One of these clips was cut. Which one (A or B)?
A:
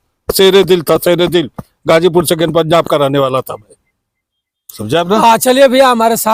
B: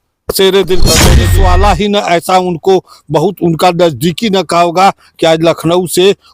B